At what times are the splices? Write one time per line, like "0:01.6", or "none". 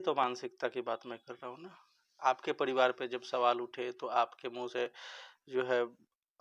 none